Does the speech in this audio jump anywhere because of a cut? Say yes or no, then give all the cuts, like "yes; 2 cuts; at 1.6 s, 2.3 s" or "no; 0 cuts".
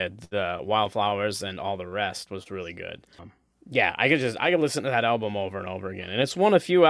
yes; 1 cut; at 3.2 s